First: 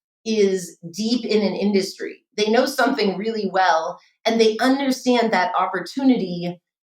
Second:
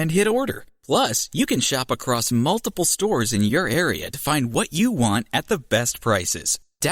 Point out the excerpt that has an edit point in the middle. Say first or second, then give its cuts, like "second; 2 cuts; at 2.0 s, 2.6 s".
first; 1 cut; at 2.3 s